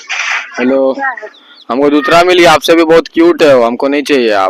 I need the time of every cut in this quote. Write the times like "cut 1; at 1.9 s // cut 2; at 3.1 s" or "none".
none